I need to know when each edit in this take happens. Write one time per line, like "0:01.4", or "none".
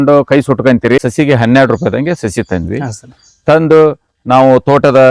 0:01.0